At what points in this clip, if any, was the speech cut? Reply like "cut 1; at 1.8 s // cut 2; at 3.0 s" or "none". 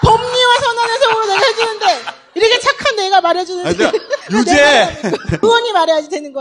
none